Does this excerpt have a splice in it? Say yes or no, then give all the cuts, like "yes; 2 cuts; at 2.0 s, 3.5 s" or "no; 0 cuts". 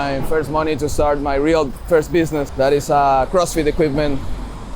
yes; 1 cut; at 2.5 s